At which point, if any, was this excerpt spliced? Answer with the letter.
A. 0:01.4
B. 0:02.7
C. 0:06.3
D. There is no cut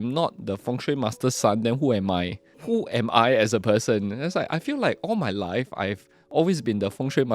B